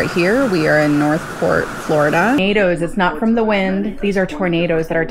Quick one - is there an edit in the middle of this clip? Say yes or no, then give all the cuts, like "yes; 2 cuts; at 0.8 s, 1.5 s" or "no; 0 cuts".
yes; 1 cut; at 2.4 s